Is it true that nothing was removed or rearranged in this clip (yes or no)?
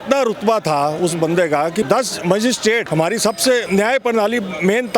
no